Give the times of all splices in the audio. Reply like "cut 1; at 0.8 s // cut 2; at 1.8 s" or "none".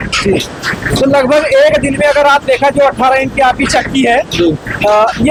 none